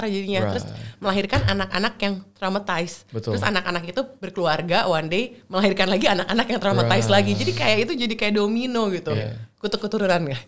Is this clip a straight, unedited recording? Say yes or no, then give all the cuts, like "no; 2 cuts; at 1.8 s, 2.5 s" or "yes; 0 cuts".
yes; 0 cuts